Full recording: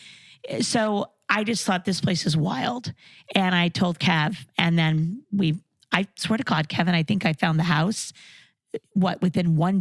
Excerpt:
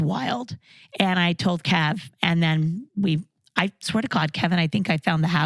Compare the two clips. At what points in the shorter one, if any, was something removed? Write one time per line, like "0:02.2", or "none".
none